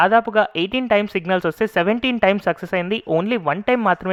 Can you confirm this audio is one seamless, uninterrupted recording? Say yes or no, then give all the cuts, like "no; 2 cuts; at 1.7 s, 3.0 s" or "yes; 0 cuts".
yes; 0 cuts